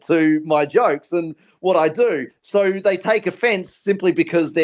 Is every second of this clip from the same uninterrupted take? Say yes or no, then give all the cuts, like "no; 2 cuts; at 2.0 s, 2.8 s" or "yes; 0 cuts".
no; 1 cut; at 2.3 s